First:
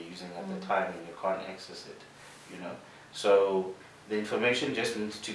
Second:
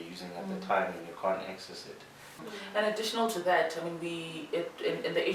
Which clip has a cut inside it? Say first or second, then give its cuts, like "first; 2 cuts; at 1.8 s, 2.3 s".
second; 1 cut; at 2.4 s